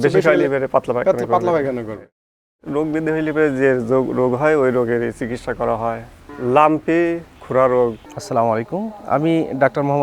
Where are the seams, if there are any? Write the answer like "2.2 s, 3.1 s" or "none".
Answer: 2.6 s, 8.0 s